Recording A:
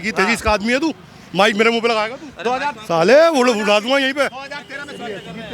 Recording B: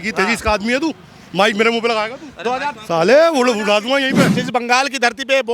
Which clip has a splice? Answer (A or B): B